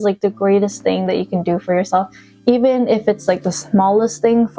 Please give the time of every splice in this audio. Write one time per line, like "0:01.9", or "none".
none